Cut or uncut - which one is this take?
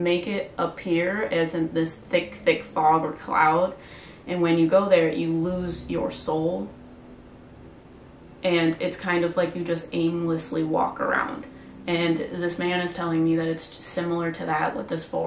uncut